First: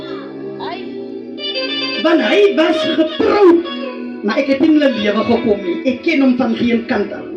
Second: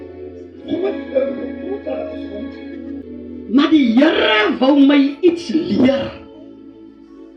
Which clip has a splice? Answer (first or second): second